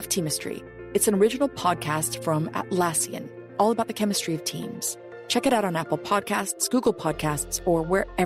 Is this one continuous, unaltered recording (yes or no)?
yes